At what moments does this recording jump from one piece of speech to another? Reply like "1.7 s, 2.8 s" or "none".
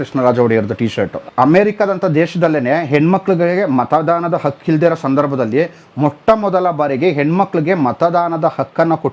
1.1 s